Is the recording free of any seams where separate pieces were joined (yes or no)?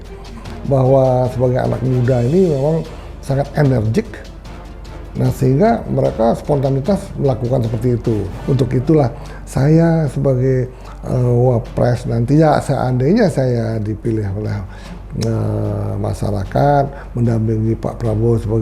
no